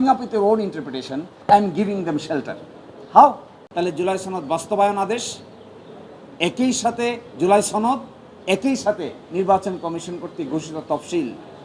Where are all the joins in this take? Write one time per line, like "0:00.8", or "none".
0:03.6